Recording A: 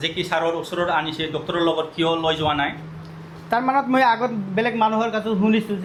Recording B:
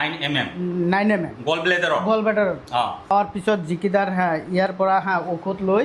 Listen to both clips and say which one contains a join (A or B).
B